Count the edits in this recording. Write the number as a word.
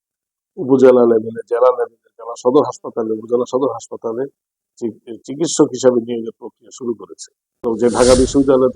one